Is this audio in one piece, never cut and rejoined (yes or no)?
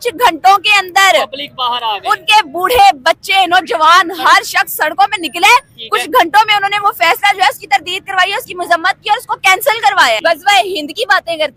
no